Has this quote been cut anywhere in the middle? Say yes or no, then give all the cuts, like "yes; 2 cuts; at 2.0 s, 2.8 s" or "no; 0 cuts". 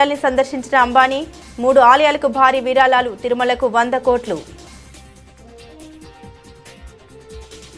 no; 0 cuts